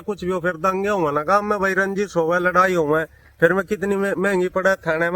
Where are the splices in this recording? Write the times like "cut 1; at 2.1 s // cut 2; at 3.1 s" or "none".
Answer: none